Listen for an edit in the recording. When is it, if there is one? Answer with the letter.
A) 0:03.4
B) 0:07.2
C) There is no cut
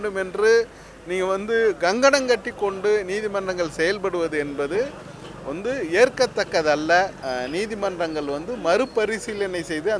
B